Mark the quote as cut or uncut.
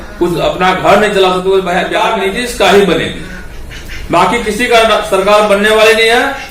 cut